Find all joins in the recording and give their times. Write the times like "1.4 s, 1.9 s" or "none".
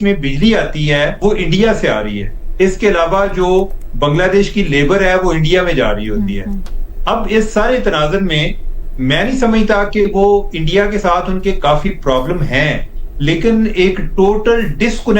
1.1 s